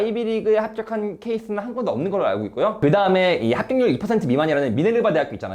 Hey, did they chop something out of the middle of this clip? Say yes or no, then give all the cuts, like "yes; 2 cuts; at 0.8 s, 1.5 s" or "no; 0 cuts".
no; 0 cuts